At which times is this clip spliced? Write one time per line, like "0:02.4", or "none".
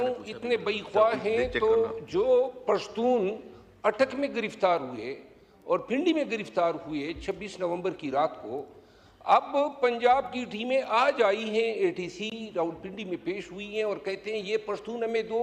none